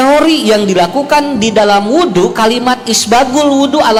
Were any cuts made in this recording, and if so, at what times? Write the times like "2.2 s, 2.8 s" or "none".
none